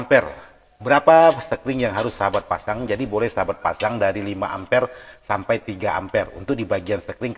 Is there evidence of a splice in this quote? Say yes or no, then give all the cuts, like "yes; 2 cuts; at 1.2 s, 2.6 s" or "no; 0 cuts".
no; 0 cuts